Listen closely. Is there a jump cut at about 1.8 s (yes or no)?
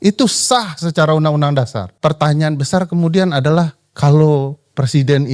yes